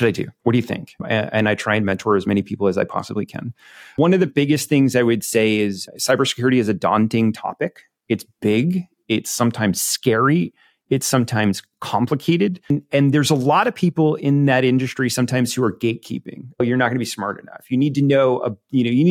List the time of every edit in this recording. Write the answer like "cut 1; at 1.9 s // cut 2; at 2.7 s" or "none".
cut 1; at 1.0 s // cut 2; at 12.7 s